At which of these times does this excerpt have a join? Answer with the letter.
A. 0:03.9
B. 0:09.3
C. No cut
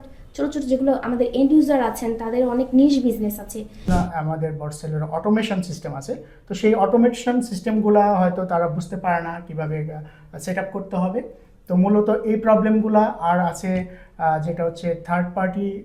A